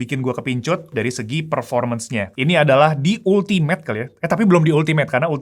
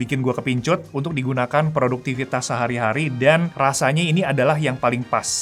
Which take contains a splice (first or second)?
first